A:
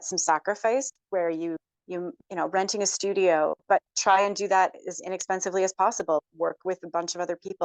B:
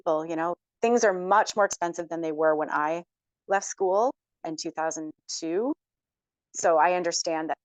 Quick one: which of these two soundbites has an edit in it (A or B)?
A